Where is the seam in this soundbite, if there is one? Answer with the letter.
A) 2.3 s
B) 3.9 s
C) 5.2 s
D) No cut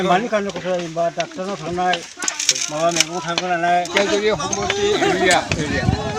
B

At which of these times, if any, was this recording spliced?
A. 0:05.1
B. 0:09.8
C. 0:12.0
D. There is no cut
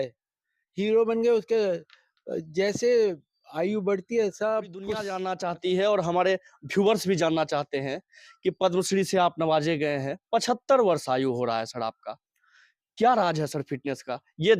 A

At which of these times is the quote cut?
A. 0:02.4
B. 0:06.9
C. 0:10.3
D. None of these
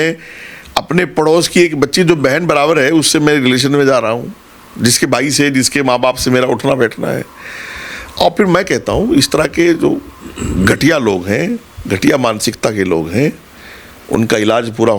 D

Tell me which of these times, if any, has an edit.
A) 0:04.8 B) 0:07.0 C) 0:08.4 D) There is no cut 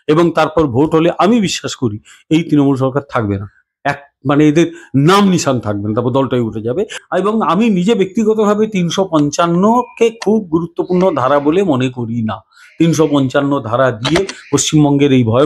B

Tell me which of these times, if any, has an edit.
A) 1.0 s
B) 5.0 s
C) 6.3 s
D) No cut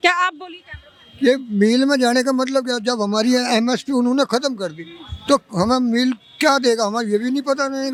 D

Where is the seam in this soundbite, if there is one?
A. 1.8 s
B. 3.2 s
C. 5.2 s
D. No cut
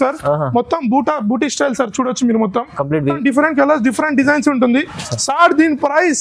B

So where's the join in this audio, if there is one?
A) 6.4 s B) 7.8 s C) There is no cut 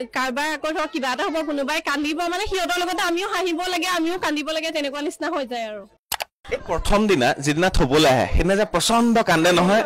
A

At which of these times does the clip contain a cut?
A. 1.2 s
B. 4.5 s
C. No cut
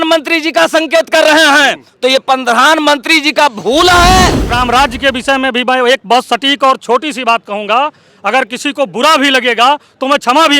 B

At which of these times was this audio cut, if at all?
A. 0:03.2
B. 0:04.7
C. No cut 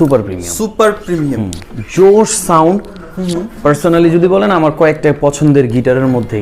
C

